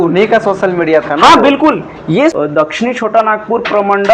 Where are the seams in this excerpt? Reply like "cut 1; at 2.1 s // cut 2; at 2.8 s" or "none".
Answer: cut 1; at 2.3 s